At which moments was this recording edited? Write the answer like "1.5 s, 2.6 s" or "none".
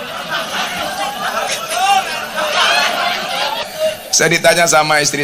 3.6 s